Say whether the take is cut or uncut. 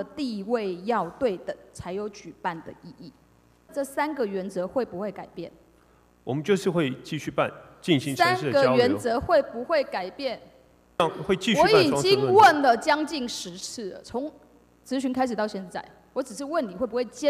cut